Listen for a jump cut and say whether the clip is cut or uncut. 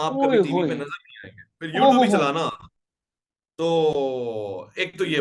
uncut